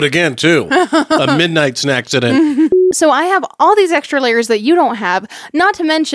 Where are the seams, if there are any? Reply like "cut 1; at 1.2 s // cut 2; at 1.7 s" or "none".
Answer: cut 1; at 2.7 s